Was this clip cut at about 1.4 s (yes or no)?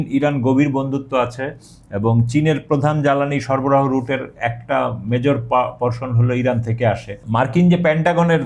no